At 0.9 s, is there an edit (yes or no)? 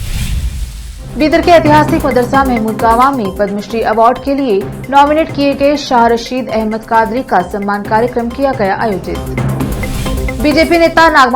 yes